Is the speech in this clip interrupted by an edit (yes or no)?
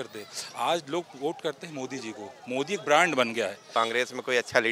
yes